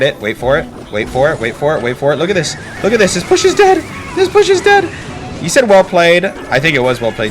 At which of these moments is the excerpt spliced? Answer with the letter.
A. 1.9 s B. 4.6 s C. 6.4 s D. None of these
C